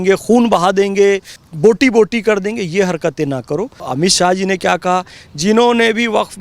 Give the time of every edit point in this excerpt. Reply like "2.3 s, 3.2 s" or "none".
1.4 s, 3.8 s